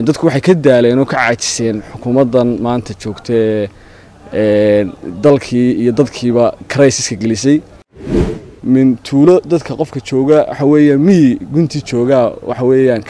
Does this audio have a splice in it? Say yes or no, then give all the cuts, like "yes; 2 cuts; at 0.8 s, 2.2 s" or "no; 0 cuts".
yes; 1 cut; at 8.2 s